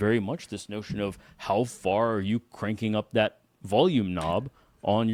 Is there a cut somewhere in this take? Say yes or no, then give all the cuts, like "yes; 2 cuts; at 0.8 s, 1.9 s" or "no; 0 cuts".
no; 0 cuts